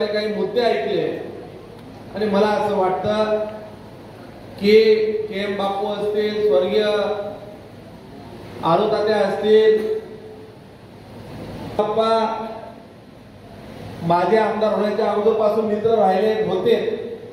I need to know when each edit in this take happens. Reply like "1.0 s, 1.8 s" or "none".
11.8 s